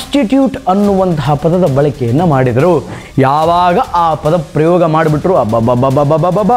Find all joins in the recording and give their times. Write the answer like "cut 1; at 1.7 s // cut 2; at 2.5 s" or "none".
cut 1; at 2.9 s

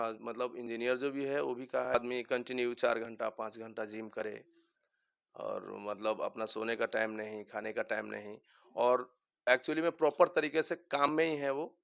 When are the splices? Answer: cut 1; at 1.9 s

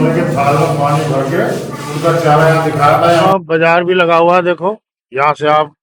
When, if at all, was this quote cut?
cut 1; at 3.3 s

